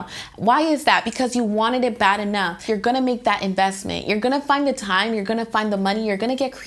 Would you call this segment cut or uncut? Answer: cut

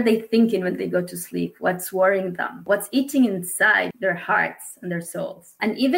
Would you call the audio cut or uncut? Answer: cut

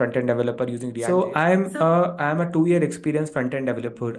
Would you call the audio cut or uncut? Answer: cut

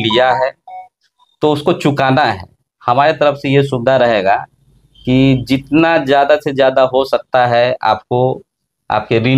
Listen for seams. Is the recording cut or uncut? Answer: uncut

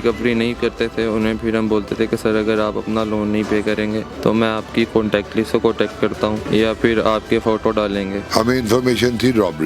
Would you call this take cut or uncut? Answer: cut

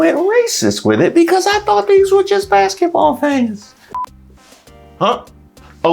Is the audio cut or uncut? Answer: cut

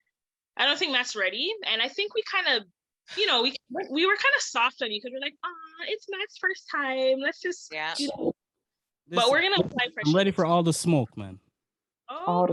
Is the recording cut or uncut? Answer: uncut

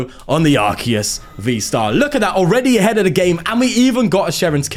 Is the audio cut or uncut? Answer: uncut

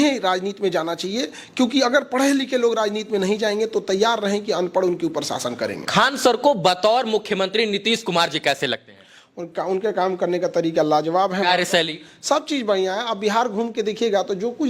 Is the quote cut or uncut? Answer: uncut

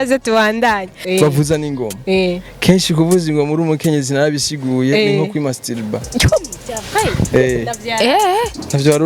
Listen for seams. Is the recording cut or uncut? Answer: cut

